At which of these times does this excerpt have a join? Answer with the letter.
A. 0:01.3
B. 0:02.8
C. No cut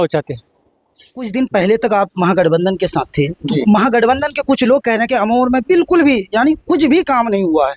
A